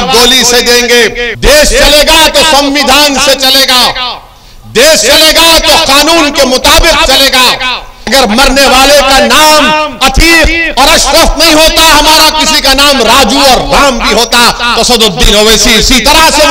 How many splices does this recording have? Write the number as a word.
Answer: two